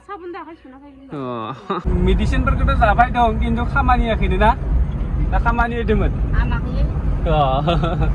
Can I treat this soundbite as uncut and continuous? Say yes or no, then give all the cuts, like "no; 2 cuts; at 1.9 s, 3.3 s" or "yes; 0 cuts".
no; 1 cut; at 1.9 s